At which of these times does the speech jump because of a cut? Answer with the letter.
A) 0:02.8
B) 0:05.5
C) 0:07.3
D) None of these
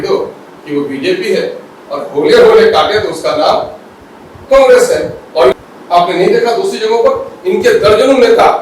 B